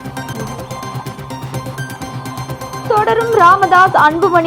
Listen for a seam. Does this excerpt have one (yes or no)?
no